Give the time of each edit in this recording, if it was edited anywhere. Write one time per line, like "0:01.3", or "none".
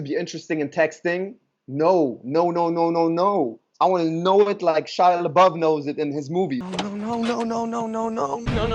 none